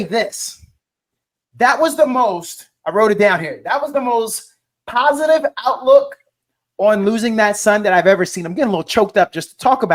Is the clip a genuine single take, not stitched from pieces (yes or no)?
yes